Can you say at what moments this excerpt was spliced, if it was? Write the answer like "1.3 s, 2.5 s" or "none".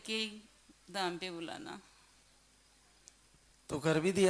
none